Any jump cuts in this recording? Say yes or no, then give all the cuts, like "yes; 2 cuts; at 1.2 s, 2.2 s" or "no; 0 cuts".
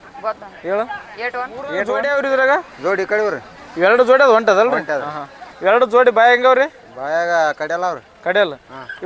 yes; 1 cut; at 1.9 s